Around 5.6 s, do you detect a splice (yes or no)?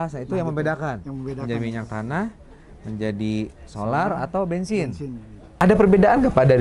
yes